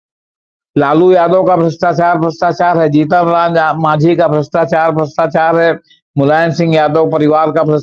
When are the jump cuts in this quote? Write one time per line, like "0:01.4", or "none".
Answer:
none